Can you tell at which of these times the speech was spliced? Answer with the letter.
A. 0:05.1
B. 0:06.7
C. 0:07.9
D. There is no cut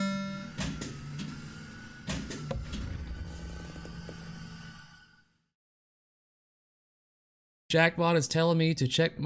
D